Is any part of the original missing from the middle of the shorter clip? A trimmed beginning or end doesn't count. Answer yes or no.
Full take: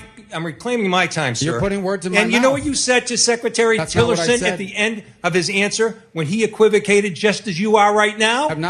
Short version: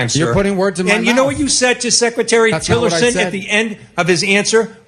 no